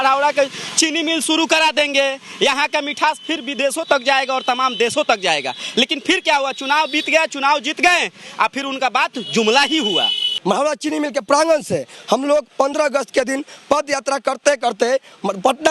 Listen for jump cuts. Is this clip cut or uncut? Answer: cut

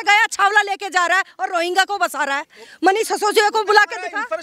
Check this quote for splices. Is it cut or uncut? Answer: uncut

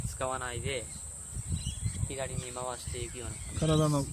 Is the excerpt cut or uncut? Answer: cut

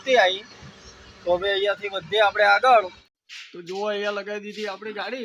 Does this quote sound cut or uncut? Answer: cut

